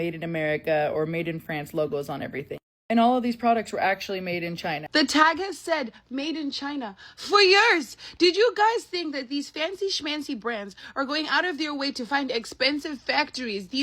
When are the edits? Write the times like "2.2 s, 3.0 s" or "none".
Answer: 4.8 s